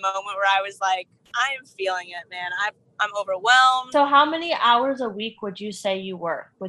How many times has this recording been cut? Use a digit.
1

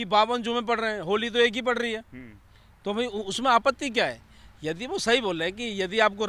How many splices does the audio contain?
0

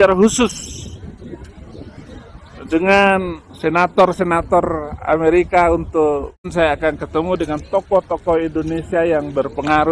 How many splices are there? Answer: 1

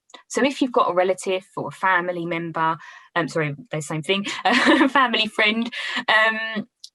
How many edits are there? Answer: 0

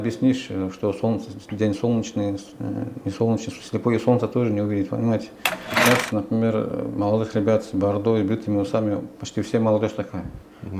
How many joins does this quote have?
1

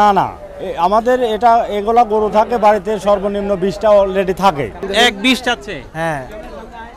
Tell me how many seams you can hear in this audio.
1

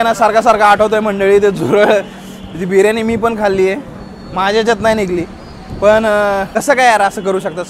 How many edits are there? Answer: 1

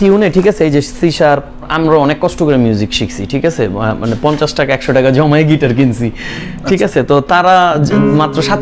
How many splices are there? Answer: 1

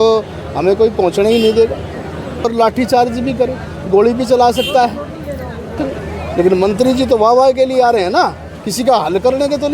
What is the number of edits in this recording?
2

